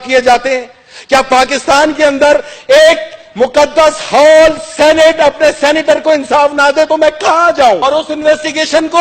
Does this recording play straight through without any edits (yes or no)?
no